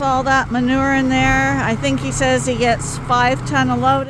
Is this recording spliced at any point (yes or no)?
no